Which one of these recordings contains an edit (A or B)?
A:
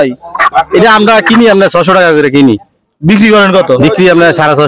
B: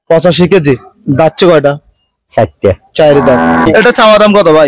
B